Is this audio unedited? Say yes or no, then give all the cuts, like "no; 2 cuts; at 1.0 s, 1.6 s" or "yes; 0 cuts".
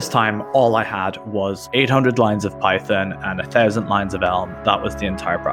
yes; 0 cuts